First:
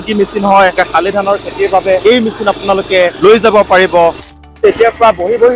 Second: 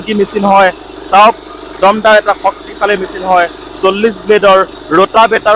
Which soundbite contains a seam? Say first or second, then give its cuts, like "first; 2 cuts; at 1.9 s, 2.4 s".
first; 4 cuts; at 0.8 s, 2.0 s, 3.1 s, 4.5 s